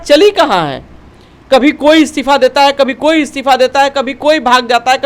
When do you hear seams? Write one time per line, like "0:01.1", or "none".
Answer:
none